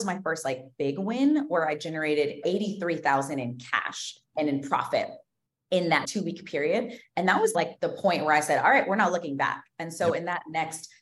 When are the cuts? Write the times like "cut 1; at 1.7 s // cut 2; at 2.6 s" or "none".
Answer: cut 1; at 2.4 s // cut 2; at 4.3 s // cut 3; at 6.0 s // cut 4; at 7.6 s